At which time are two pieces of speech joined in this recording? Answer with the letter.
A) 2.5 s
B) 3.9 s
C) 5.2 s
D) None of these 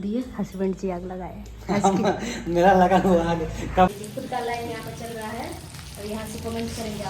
B